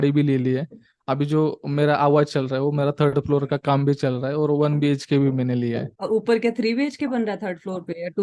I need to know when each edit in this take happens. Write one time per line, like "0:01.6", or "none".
0:05.9